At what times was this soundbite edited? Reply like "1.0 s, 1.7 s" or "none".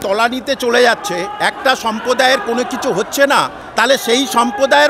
3.6 s